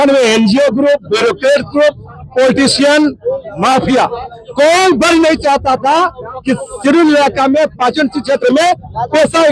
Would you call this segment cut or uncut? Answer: uncut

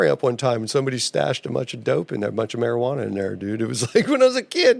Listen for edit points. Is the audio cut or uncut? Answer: uncut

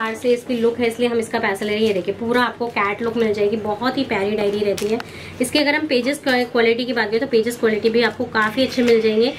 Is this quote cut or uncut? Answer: uncut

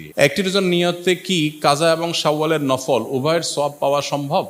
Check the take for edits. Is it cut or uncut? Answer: uncut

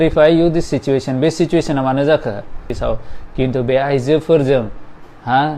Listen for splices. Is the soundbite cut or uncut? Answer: cut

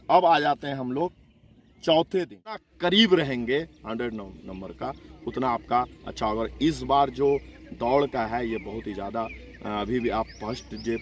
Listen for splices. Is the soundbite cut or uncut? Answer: cut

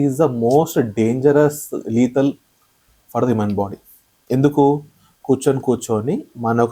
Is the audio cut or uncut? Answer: uncut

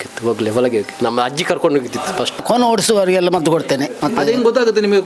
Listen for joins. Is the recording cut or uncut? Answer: cut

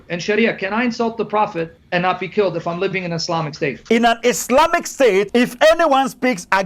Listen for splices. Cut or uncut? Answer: cut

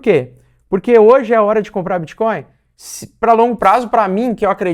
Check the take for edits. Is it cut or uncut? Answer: uncut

